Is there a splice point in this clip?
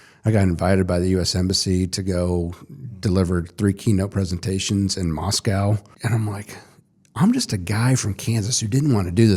yes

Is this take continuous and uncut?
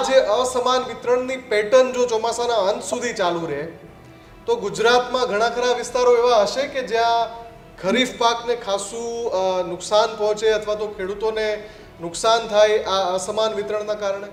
yes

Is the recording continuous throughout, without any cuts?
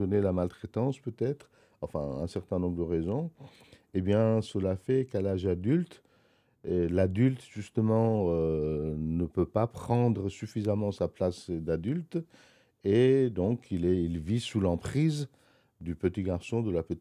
yes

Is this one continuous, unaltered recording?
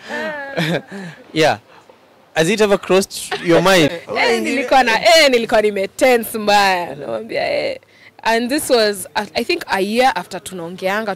no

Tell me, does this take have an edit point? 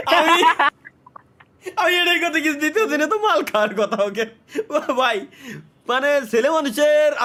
no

